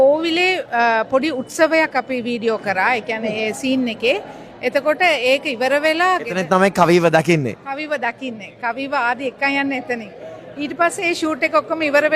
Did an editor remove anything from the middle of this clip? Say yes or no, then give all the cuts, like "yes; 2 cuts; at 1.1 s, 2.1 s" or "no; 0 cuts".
no; 0 cuts